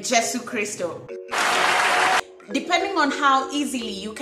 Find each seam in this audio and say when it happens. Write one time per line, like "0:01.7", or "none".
0:01.1
0:02.2